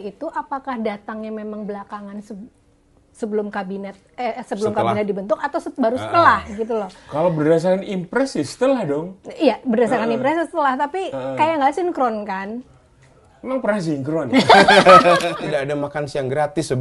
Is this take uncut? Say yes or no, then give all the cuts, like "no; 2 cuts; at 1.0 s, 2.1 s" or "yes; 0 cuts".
no; 1 cut; at 15.3 s